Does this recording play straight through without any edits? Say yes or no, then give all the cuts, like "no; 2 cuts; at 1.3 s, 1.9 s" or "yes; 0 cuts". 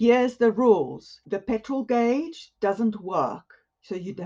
yes; 0 cuts